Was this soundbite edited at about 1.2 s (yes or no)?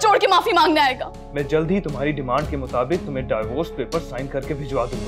yes